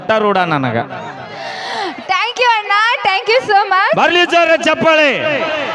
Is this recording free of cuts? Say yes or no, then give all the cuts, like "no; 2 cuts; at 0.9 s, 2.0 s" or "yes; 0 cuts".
yes; 0 cuts